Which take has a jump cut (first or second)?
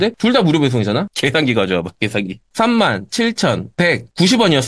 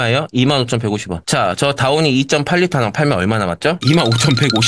first